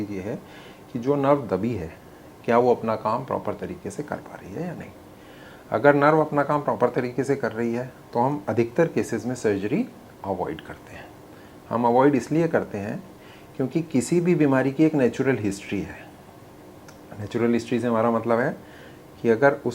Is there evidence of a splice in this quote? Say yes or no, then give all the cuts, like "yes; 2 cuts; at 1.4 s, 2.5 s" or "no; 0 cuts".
no; 0 cuts